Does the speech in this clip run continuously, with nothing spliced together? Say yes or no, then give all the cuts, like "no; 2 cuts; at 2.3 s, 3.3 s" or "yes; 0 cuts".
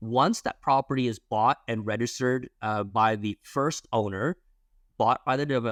yes; 0 cuts